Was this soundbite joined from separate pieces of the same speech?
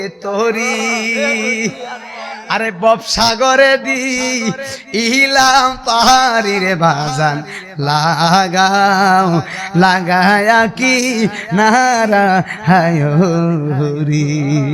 no; 0 cuts

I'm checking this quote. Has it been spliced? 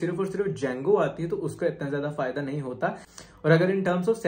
yes; 1 cut; at 3.1 s

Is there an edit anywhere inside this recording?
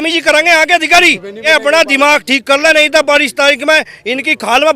yes; 1 cut; at 1.4 s

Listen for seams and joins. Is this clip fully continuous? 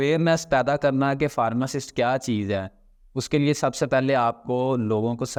yes; 0 cuts

